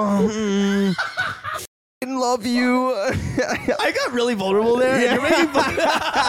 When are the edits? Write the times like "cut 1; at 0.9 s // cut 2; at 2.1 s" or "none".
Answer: cut 1; at 2.1 s // cut 2; at 3.8 s